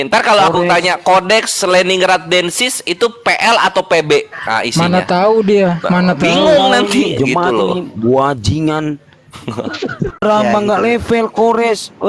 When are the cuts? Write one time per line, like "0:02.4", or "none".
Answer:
0:10.1